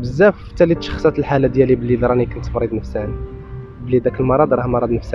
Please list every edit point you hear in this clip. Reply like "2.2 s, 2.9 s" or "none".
none